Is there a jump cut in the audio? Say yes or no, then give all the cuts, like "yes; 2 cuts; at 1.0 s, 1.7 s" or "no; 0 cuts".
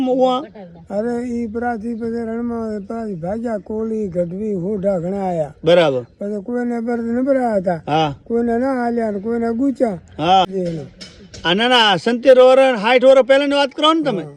yes; 1 cut; at 10.5 s